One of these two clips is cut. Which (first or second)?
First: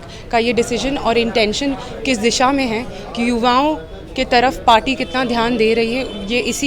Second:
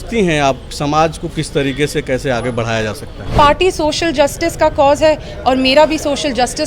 second